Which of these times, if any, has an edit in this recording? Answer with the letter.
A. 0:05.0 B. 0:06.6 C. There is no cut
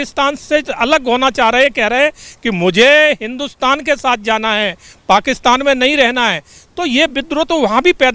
C